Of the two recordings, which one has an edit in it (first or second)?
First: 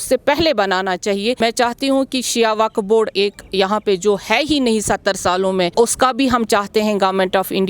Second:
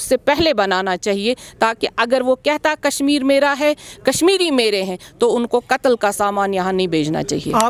first